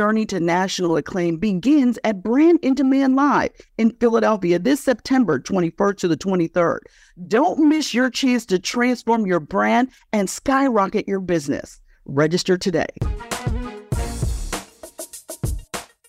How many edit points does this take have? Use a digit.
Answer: 2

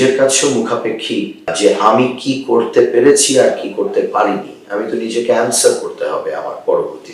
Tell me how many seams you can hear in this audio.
1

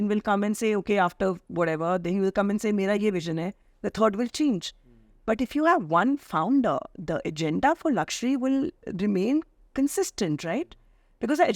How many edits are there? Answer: 0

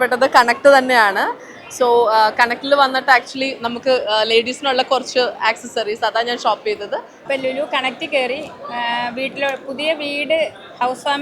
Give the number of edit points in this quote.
1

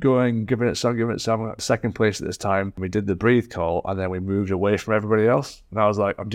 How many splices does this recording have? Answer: 2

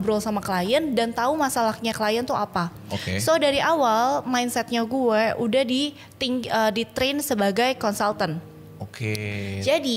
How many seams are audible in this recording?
0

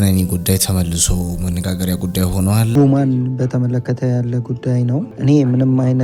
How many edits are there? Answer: 2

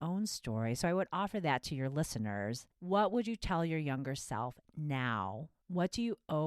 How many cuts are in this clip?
2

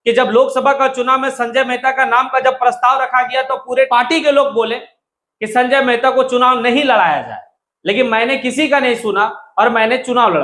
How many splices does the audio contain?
1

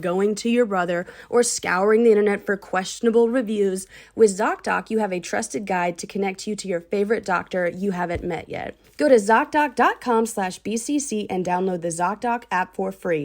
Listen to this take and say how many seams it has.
1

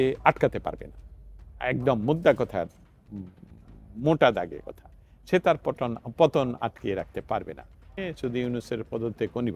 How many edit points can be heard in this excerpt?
1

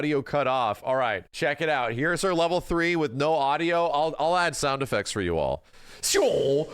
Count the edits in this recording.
1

